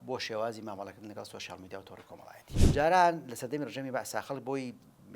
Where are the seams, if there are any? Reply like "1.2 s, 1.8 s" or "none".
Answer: 2.5 s